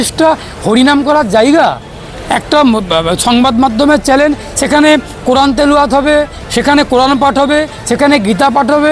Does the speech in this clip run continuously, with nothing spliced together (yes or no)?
yes